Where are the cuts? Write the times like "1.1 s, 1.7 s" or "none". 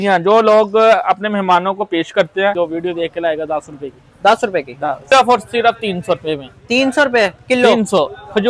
2.6 s, 5.1 s